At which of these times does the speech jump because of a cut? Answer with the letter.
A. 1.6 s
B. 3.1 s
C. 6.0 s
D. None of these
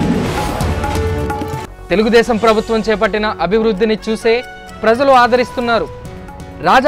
A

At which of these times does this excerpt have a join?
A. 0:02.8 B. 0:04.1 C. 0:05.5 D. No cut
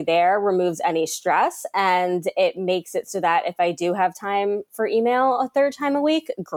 D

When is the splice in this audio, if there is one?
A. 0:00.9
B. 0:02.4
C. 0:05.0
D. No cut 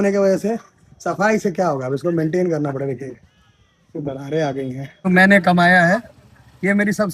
C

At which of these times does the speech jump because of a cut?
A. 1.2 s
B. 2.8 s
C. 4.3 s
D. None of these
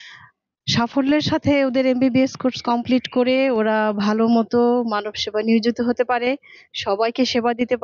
D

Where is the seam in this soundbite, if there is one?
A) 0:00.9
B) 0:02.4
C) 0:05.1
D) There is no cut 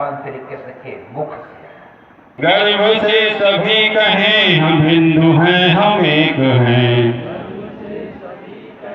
B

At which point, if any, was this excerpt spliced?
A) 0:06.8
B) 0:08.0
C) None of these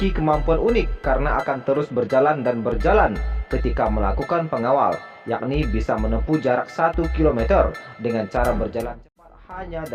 C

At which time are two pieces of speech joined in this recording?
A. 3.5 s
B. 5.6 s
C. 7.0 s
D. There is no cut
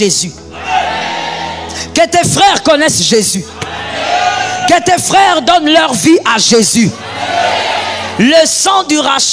D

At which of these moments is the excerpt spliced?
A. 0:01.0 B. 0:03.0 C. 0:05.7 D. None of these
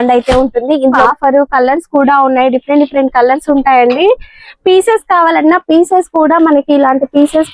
A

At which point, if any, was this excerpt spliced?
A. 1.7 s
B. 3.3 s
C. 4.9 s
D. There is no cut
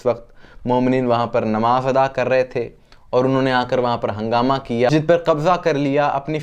C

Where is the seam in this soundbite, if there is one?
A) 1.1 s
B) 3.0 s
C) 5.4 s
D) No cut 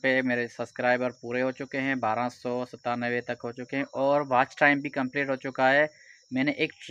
D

